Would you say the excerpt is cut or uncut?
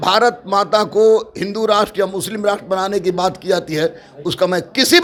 uncut